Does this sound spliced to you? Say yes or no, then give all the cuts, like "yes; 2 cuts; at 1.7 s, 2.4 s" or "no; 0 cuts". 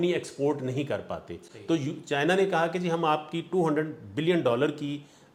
no; 0 cuts